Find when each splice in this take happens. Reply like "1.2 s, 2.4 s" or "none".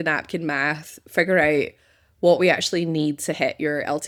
none